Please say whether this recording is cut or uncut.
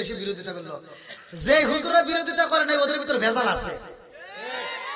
uncut